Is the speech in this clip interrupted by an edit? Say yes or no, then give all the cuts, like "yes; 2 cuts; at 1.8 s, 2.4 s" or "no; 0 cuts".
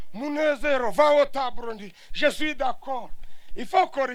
no; 0 cuts